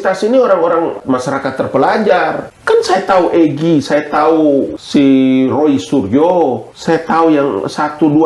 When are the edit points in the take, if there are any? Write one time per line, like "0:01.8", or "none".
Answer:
0:01.0
0:02.5
0:04.8
0:06.7